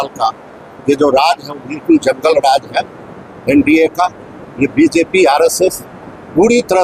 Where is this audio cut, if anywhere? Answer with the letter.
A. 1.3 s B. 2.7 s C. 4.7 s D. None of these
D